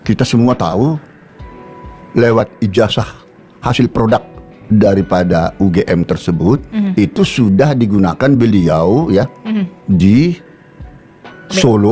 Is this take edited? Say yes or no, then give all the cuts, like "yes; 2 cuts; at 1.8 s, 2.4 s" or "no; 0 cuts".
no; 0 cuts